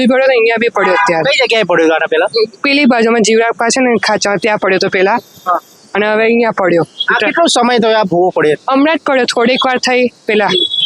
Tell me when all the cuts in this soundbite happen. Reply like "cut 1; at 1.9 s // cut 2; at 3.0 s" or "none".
none